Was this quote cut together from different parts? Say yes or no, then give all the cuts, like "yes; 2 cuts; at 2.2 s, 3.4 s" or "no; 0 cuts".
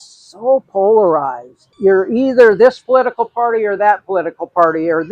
yes; 1 cut; at 1.7 s